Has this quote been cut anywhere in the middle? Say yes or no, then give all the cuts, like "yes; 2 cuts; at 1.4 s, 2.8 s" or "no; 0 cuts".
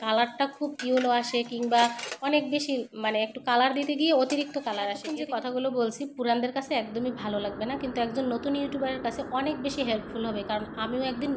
yes; 1 cut; at 5.1 s